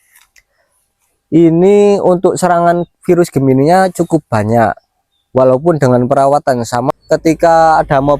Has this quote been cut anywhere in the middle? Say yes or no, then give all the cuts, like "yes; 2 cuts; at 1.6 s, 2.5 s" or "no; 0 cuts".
yes; 1 cut; at 6.9 s